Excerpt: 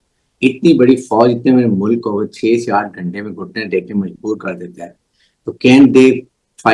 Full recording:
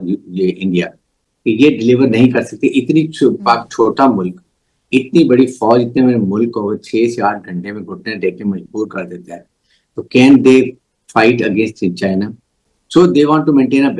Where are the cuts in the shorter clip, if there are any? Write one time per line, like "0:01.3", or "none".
none